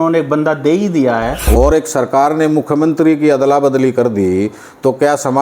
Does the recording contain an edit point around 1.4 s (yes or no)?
yes